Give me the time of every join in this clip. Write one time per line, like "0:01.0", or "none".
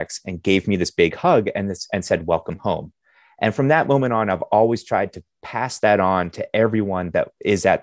none